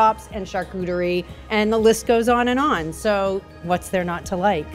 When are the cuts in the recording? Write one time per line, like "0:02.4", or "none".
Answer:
0:01.4
0:03.6